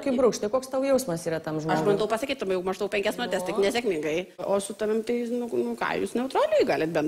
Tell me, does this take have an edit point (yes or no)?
yes